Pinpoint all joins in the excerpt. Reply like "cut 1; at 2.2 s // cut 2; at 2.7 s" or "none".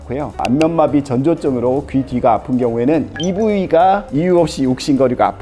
cut 1; at 3.1 s